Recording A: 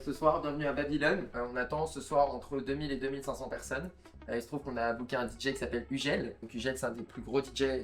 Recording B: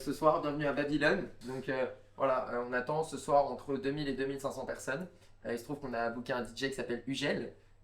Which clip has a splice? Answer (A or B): A